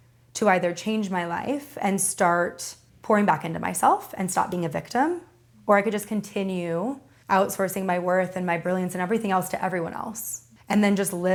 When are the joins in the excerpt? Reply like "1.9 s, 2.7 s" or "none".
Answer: none